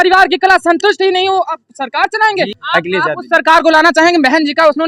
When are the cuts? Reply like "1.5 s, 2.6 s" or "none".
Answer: 2.5 s